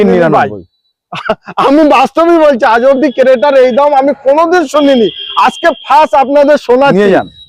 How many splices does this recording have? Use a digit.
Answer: 0